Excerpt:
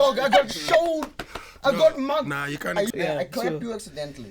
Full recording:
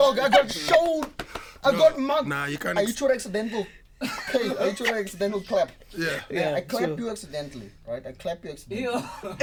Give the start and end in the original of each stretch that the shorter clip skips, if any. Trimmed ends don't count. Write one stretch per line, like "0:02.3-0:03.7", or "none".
0:02.9-0:06.3

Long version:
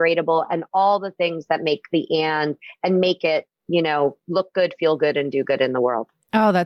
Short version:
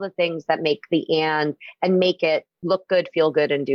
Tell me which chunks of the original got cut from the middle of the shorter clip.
0:03.6-0:04.2

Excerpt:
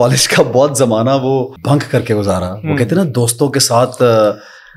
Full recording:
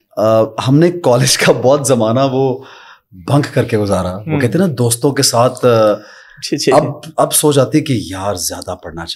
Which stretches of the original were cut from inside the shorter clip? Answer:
0:02.6-0:03.2

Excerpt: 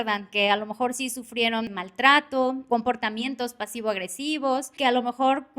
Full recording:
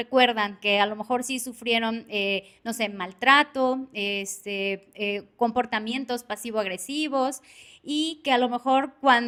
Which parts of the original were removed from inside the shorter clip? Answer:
0:02.0-0:03.0
0:03.8-0:05.3
0:07.4-0:08.2

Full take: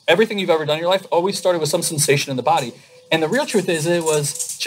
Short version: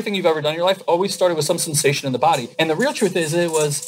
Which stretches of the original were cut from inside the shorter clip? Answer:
0:02.7-0:03.0

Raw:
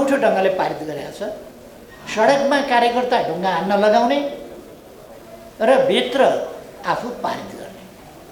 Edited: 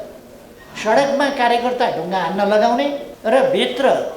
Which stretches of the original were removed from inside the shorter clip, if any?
0:04.4-0:05.4

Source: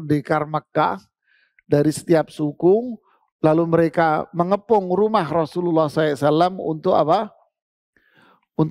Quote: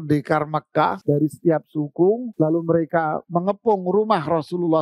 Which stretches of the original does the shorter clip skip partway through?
0:01.0-0:01.6
0:02.9-0:03.3

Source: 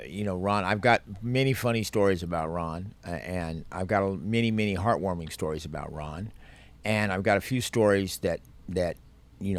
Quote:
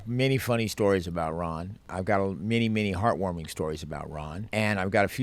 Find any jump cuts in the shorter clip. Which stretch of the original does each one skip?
0:02.9-0:03.6
0:06.2-0:06.7

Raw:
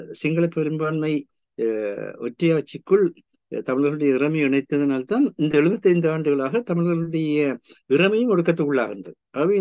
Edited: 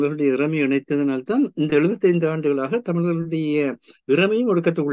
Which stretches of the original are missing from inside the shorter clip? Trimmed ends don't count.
none

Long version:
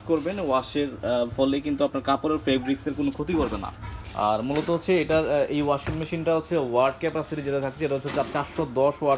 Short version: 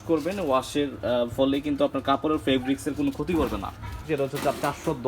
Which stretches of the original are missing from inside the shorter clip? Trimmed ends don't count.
0:04.0-0:07.7

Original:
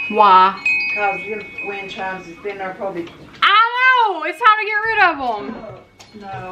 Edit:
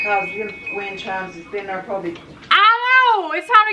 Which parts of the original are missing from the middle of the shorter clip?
none

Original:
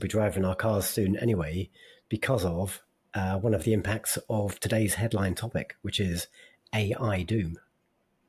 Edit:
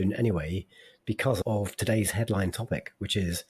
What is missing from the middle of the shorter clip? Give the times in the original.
0:02.4-0:04.2

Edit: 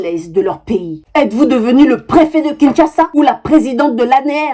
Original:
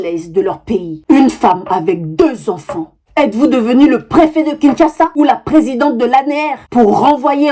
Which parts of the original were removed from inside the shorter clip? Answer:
0:00.9-0:02.9

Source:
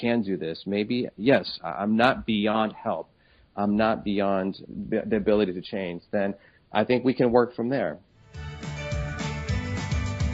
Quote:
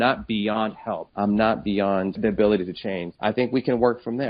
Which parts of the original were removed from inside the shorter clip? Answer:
0:03.0-0:03.5
0:04.6-0:05.0
0:06.0-0:06.6

